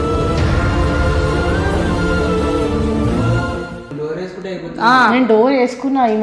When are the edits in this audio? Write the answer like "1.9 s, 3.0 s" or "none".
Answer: none